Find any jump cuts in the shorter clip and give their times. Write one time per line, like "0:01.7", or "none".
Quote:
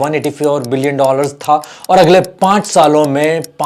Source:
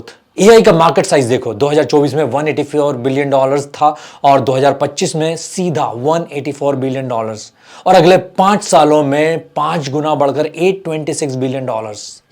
0:01.7